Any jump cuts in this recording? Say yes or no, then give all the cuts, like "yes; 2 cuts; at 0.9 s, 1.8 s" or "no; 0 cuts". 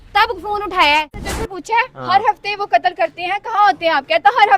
yes; 1 cut; at 1.2 s